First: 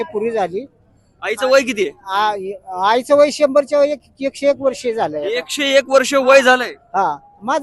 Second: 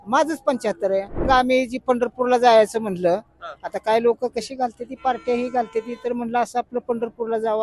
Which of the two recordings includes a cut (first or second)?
second